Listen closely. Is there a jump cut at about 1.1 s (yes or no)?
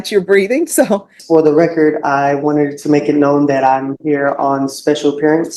yes